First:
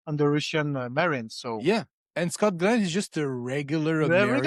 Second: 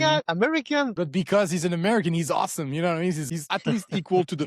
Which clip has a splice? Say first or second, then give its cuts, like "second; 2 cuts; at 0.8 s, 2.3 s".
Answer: second; 2 cuts; at 0.9 s, 3.5 s